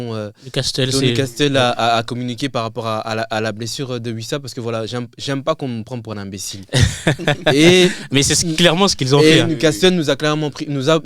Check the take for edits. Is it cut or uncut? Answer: uncut